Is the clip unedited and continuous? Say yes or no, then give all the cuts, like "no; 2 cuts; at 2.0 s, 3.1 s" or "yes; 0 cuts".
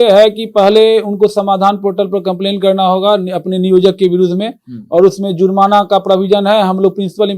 yes; 0 cuts